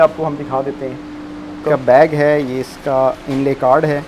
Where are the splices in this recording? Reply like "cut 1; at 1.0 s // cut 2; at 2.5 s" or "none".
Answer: cut 1; at 1.6 s